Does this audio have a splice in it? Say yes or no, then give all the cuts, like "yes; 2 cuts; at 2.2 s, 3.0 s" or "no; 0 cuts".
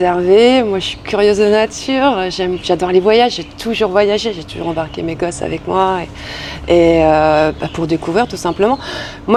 no; 0 cuts